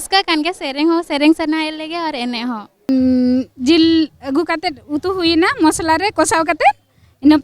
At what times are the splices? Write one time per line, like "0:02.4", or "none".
0:02.9